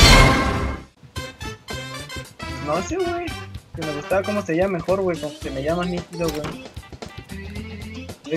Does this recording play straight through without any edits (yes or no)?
no